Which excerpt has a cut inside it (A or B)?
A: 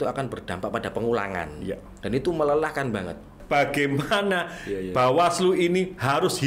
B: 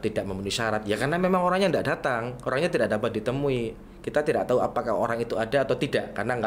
A